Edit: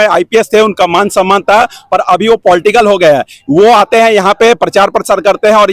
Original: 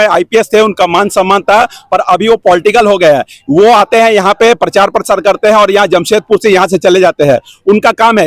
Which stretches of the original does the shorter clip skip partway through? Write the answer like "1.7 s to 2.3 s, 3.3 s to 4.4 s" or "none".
none